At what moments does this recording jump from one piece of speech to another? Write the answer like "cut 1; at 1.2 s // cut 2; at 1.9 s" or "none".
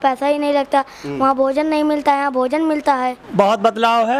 cut 1; at 3.2 s